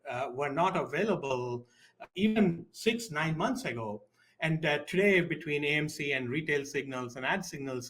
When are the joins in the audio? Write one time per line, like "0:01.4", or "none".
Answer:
none